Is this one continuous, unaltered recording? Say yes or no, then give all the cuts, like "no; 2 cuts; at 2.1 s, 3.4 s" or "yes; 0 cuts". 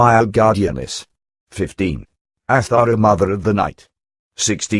no; 1 cut; at 3.7 s